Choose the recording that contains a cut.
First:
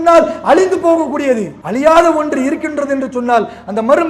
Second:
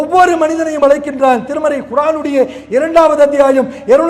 first; 1 cut; at 1.6 s

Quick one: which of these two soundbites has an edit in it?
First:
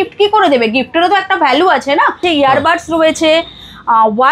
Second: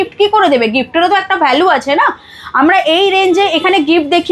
first; 1 cut; at 2.2 s

